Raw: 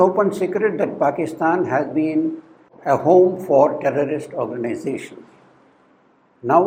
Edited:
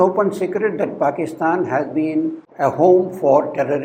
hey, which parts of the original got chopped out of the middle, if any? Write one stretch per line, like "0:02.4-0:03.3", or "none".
0:02.4-0:02.7